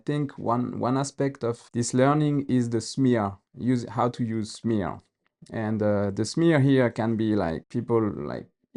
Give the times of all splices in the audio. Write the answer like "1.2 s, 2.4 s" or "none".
1.6 s, 7.6 s